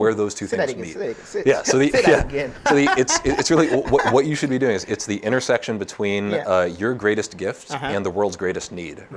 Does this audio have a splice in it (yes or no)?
no